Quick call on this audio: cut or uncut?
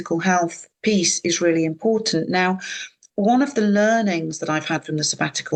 uncut